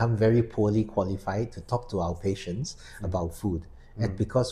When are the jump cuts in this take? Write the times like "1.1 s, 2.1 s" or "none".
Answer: none